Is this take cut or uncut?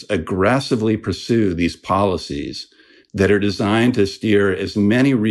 uncut